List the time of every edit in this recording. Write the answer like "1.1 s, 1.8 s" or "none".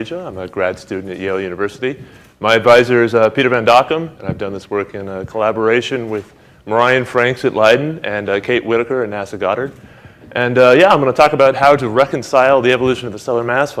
none